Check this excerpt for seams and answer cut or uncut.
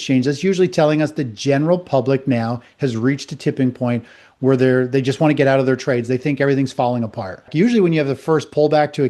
cut